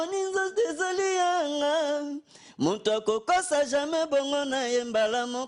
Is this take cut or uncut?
uncut